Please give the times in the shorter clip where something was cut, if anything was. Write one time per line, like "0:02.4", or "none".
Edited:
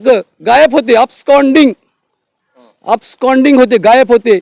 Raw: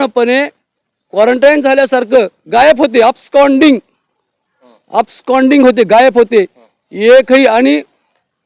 none